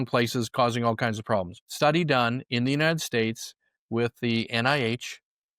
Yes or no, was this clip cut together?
yes